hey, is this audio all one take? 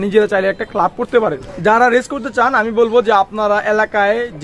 no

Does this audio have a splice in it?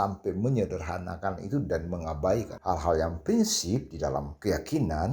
yes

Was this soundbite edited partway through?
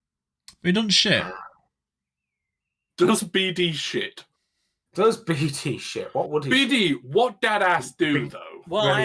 no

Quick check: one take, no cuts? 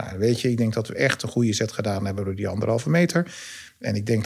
yes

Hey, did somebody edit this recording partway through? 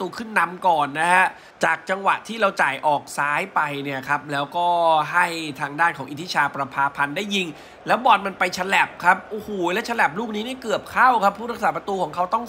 no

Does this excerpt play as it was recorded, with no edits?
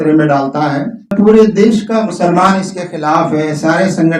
no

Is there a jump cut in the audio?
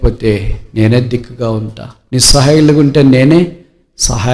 no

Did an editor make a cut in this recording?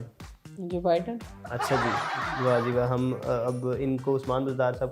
no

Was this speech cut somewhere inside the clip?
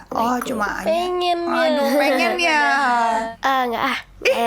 yes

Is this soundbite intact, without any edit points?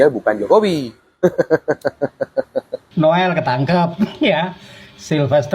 no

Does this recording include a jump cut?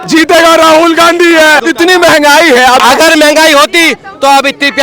yes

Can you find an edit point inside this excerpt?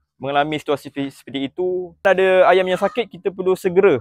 yes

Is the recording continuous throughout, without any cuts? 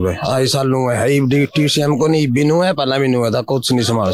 yes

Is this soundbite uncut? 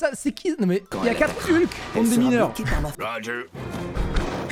yes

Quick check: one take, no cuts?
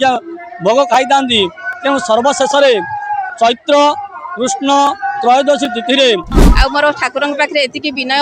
no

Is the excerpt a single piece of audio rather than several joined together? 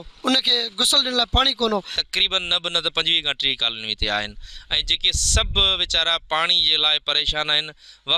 yes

